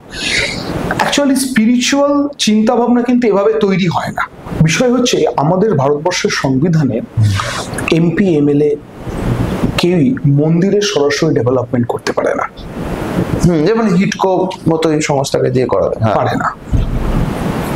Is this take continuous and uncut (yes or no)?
no